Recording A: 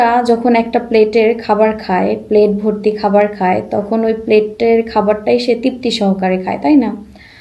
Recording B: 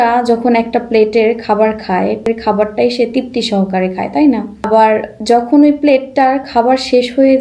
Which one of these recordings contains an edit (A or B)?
B